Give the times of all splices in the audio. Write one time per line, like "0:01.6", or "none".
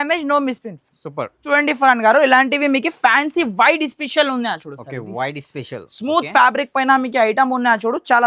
none